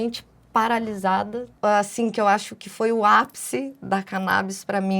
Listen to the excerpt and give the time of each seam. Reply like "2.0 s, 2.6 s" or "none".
1.4 s